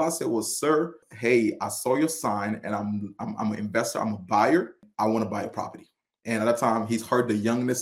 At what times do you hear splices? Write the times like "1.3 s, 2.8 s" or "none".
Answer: 1.0 s, 4.8 s